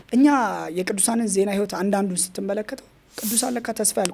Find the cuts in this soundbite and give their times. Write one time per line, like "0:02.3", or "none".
none